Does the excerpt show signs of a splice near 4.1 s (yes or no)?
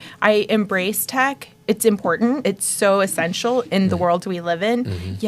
no